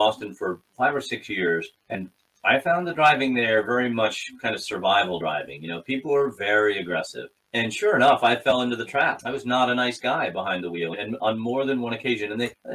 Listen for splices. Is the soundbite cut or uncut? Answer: uncut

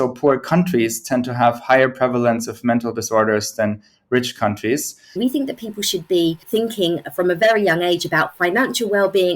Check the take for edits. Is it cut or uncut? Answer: cut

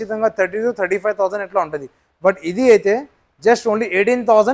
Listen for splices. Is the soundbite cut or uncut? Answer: uncut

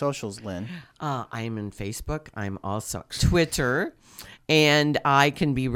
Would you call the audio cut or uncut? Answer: cut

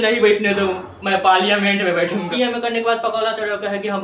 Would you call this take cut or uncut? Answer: cut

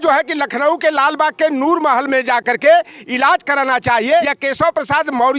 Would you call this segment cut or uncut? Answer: cut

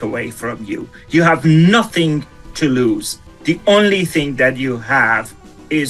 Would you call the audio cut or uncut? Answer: uncut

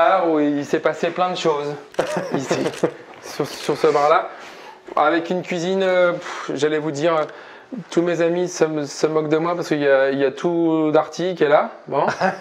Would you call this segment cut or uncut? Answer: uncut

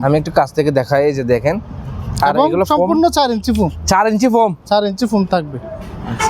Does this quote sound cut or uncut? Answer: uncut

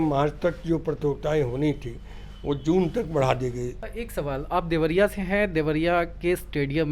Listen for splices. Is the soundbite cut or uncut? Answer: cut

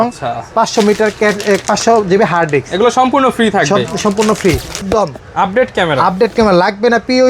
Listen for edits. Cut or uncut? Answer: cut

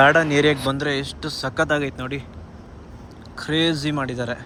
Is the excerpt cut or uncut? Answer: uncut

